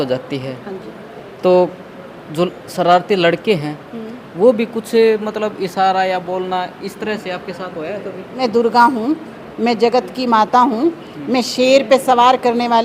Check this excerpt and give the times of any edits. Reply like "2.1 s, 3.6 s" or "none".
8.4 s